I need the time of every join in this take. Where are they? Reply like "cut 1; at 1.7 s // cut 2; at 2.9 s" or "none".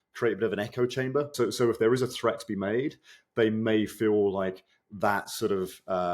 cut 1; at 1.3 s